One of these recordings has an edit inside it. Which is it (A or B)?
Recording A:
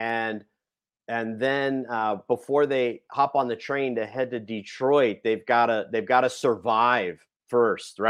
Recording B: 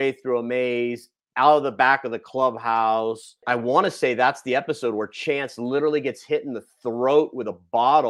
B